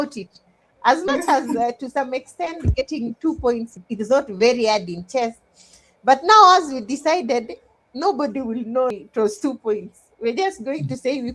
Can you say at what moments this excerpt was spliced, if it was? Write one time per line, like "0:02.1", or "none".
0:08.9

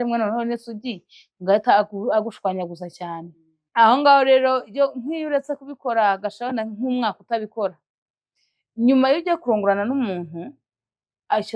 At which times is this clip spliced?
none

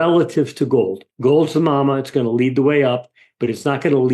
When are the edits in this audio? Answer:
0:01.1

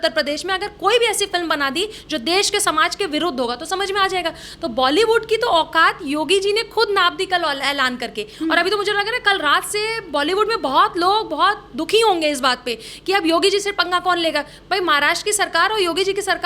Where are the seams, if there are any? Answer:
none

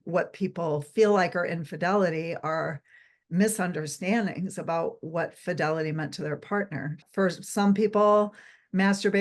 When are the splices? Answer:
0:07.0

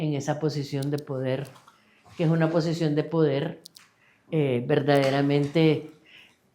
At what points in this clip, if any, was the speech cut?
none

